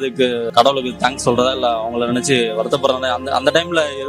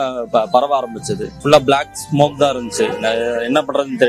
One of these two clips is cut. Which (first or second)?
second